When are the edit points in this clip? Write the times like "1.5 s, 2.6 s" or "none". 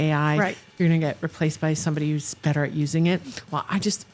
none